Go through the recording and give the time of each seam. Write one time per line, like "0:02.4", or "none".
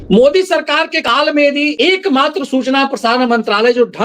0:01.0
0:01.7